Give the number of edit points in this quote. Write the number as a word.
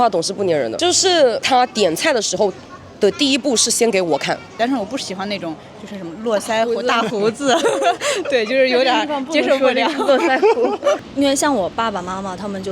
three